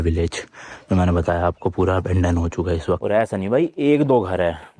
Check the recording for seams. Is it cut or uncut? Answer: cut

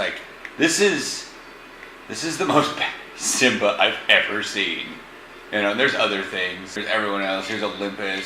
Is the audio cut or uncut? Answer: uncut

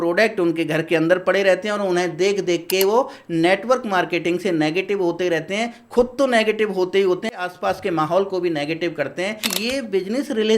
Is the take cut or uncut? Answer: cut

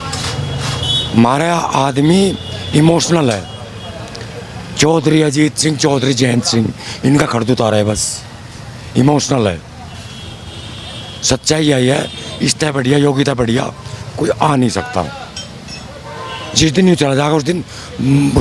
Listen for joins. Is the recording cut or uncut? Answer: uncut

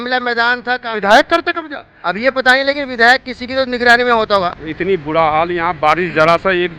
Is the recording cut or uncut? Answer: cut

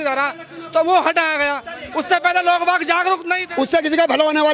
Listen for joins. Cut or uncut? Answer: cut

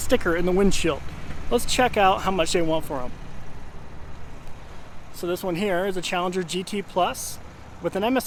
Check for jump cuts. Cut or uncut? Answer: uncut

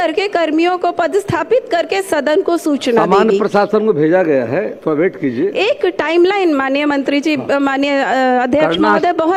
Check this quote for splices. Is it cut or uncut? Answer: uncut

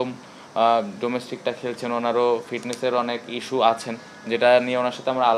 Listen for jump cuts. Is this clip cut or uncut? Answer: uncut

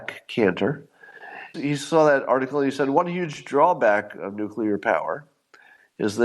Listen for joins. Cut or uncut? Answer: cut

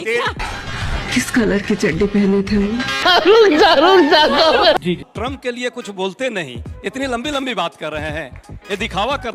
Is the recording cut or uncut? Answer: cut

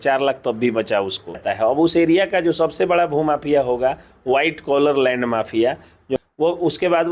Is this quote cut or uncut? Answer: cut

